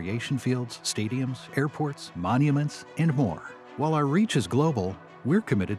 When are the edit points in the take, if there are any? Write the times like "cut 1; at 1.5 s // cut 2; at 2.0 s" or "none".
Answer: none